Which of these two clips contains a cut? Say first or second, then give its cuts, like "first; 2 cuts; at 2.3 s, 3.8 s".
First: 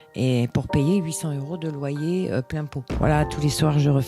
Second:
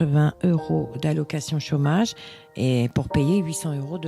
first; 1 cut; at 2.8 s